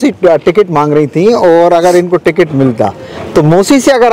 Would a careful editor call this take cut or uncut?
uncut